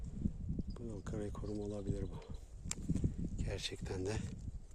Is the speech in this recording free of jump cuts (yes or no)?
yes